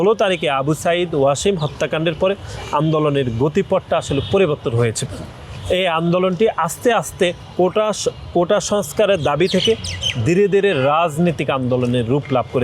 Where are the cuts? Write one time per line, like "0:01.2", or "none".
none